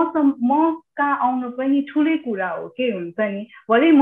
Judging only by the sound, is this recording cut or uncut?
uncut